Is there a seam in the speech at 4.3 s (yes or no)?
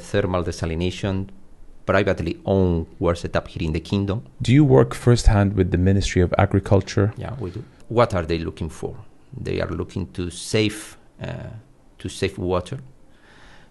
yes